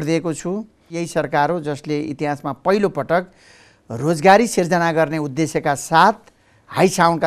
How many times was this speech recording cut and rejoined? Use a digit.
1